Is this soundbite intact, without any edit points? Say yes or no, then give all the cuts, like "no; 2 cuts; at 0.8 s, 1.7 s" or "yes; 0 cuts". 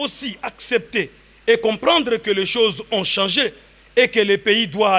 yes; 0 cuts